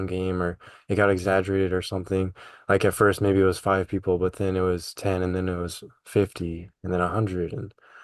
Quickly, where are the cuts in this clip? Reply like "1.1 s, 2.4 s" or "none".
none